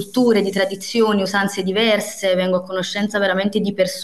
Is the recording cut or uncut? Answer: uncut